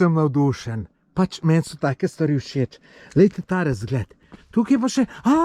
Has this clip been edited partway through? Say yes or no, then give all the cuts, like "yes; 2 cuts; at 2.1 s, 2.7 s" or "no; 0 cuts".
yes; 1 cut; at 4.3 s